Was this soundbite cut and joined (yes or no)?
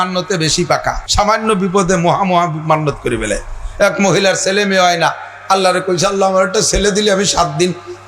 yes